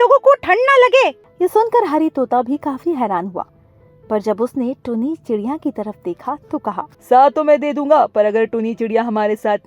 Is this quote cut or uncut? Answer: cut